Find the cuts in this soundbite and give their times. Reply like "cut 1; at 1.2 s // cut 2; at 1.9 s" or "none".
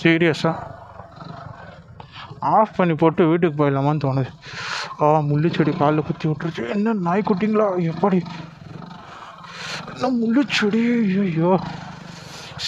none